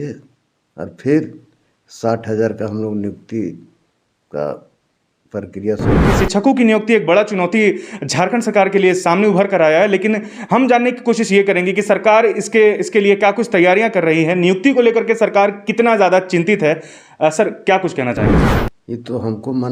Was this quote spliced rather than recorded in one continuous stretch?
yes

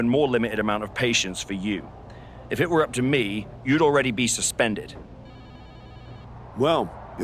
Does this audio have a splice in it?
yes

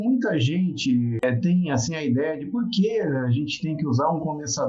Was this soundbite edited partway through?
no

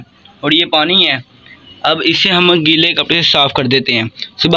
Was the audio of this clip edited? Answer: no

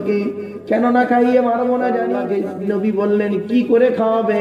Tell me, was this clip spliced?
yes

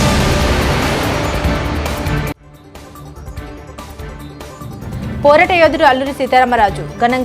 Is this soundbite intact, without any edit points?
yes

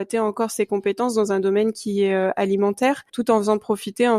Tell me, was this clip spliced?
yes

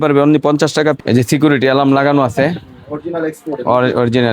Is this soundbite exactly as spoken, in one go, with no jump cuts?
no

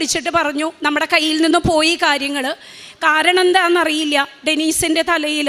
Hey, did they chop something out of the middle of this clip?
no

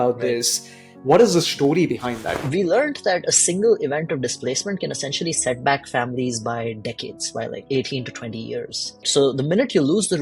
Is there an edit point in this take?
yes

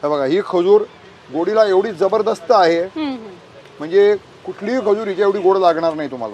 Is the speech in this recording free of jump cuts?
yes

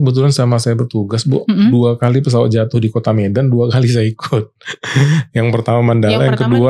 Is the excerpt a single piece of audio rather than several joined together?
yes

